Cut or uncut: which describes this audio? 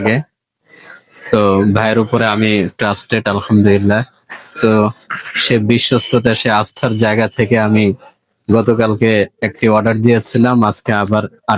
uncut